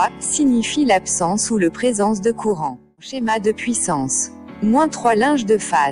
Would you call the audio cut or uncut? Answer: cut